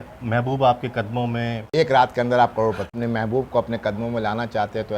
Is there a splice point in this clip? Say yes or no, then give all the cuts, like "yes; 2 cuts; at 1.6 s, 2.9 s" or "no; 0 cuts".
yes; 2 cuts; at 1.7 s, 2.9 s